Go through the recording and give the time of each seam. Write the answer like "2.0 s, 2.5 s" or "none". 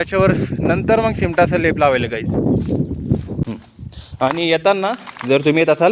3.4 s